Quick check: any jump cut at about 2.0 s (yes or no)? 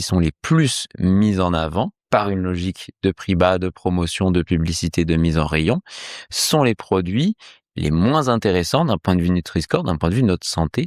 yes